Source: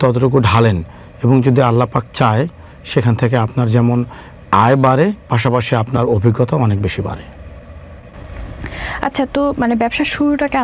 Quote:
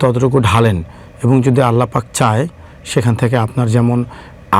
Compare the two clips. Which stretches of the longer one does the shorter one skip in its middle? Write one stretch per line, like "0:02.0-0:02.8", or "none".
none